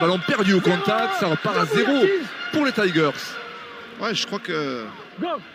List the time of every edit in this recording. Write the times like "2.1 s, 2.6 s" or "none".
none